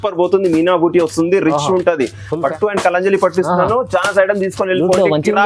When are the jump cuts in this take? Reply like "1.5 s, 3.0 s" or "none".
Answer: 2.5 s